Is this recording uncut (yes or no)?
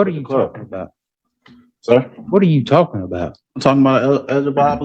yes